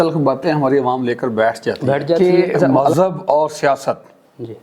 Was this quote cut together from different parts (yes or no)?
yes